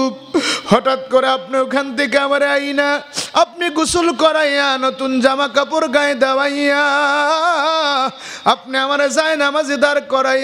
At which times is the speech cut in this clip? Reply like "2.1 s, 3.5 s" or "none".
none